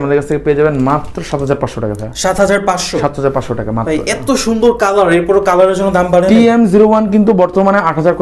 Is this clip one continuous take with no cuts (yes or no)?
yes